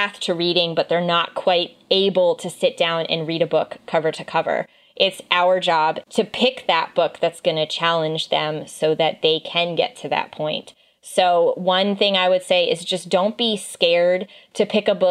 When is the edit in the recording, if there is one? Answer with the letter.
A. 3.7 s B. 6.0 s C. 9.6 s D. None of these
B